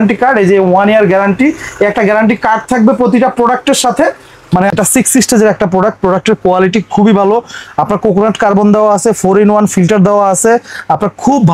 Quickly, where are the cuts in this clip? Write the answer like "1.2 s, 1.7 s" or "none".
4.7 s